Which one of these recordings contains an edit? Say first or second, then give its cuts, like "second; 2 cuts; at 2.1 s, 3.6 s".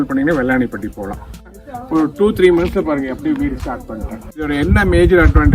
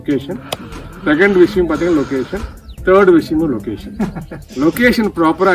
first; 2 cuts; at 1.6 s, 4.4 s